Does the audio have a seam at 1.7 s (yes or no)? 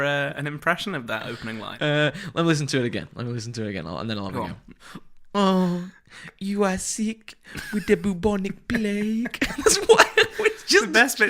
yes